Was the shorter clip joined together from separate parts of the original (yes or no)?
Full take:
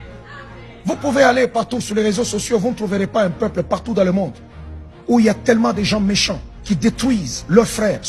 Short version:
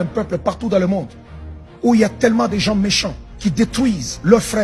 no